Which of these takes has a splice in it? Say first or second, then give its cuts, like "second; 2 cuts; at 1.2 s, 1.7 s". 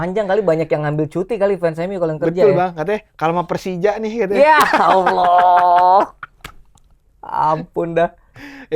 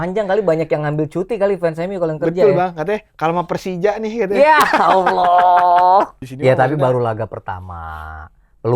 second; 1 cut; at 6.2 s